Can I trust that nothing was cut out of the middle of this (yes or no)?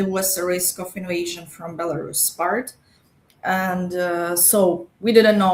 yes